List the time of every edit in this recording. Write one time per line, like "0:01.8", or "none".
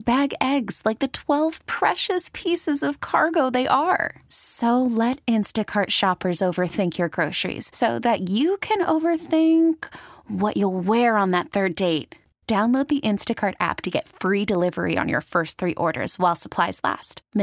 none